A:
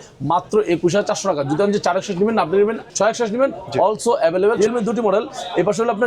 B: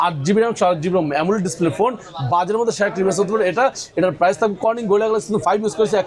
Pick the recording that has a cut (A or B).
A